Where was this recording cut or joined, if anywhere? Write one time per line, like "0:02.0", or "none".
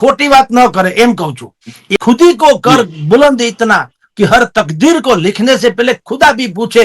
0:01.9